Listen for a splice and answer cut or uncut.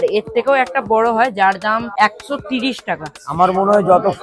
cut